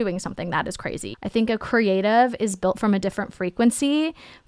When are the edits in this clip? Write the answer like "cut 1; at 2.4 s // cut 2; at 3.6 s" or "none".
cut 1; at 1.0 s